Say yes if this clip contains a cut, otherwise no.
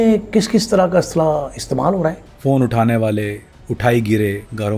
yes